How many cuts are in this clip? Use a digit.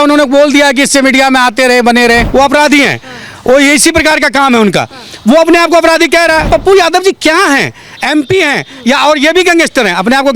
2